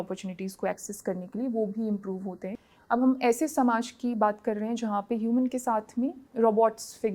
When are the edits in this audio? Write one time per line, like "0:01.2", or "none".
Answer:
0:02.5
0:06.2